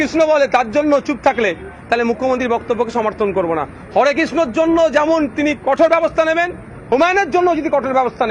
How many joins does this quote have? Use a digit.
0